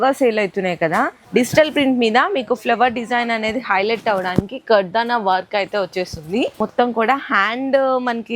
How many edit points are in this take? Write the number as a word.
two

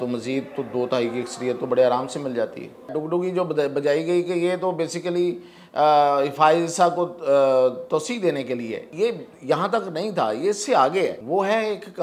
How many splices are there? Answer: three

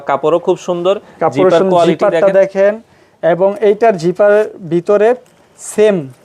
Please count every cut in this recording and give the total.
zero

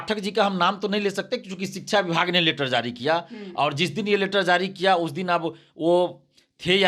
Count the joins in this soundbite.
zero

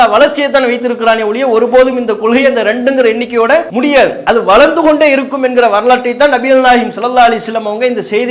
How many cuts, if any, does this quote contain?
one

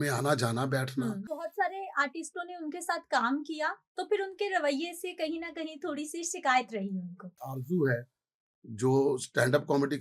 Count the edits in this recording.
two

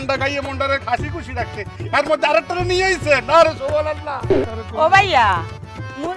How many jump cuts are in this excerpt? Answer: one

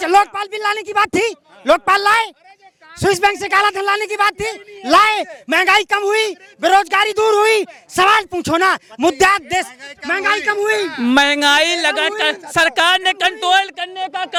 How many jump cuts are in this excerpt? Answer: zero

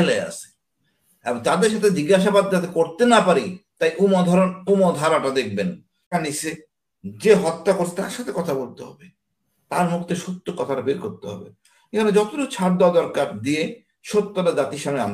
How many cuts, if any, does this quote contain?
one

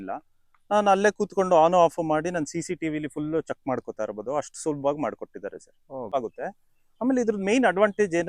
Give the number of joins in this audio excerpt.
one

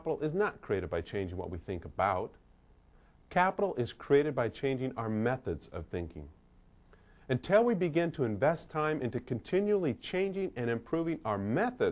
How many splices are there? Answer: one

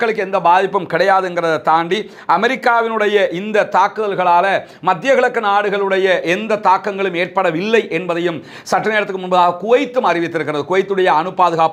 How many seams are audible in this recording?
zero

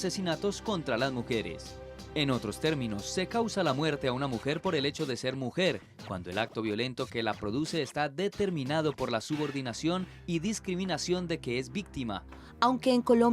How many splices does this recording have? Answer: one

